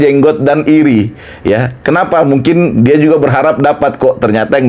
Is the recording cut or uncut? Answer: uncut